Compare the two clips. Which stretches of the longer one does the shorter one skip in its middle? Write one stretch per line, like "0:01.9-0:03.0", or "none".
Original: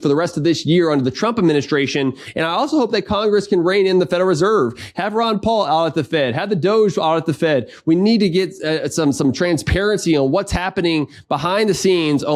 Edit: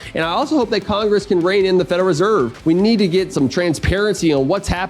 0:04.8-0:07.8
0:08.5-0:09.2